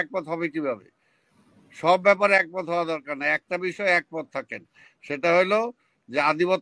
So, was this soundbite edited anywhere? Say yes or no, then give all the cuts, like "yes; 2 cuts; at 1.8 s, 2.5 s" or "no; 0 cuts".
no; 0 cuts